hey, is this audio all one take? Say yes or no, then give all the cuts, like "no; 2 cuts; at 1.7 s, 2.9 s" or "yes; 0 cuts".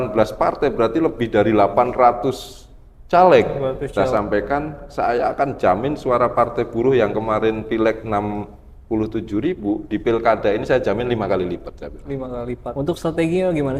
no; 2 cuts; at 3.9 s, 12.7 s